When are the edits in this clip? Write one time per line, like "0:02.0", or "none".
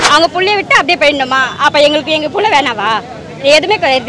none